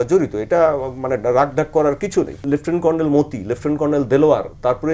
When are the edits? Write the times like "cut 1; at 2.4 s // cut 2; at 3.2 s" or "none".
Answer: cut 1; at 2.4 s

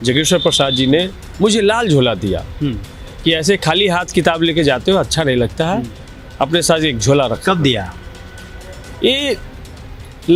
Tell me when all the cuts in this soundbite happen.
none

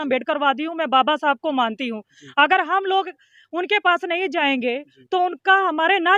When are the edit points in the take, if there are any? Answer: none

